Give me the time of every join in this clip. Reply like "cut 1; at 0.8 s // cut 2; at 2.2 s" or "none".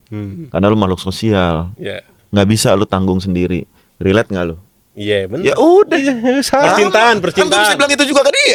none